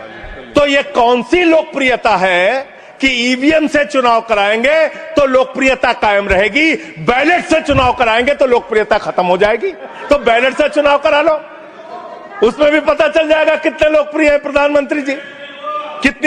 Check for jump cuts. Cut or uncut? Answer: cut